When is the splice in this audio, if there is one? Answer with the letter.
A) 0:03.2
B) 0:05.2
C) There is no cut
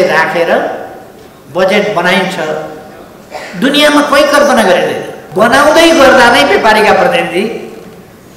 B